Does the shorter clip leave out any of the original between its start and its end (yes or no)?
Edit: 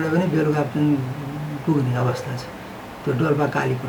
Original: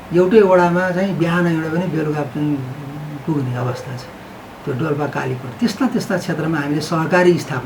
no